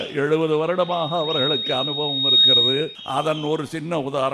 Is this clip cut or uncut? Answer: cut